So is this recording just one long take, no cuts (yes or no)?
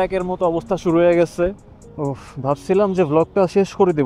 no